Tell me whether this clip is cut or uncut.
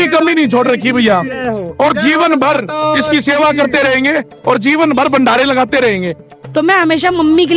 cut